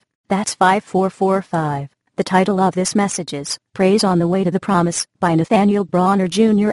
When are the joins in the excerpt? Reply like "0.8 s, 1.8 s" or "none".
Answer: none